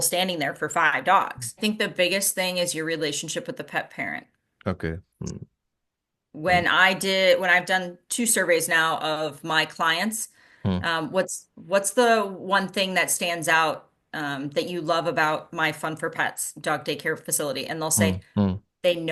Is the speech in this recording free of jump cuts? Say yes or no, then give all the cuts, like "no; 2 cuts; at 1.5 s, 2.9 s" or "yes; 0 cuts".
no; 1 cut; at 1.6 s